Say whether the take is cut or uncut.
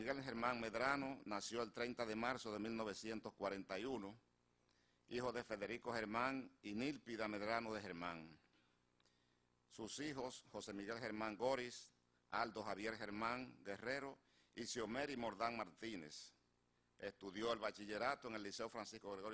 cut